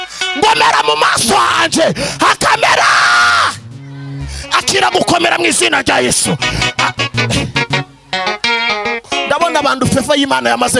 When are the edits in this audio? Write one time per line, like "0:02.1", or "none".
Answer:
0:09.0